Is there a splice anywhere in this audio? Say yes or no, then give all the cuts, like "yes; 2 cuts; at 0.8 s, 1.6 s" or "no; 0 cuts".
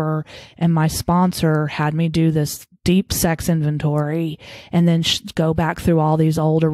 no; 0 cuts